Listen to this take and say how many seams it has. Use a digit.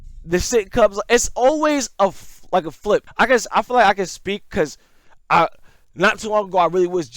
1